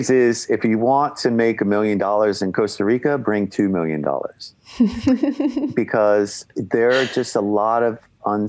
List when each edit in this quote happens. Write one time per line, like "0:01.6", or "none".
none